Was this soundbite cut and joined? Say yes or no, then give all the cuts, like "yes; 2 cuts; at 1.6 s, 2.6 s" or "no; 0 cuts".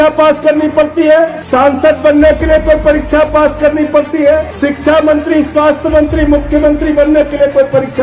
yes; 2 cuts; at 1.4 s, 4.5 s